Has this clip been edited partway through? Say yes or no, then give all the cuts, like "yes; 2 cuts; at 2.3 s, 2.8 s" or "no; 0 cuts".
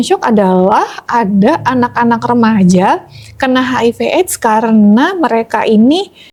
no; 0 cuts